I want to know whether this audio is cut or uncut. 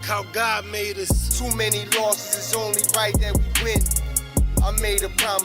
cut